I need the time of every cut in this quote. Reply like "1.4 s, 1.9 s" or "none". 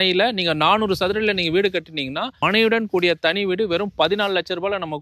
none